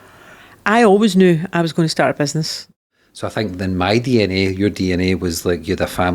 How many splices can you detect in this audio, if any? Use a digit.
1